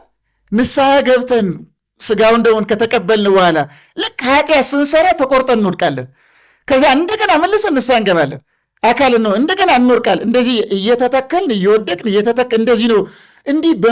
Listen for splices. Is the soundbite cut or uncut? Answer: uncut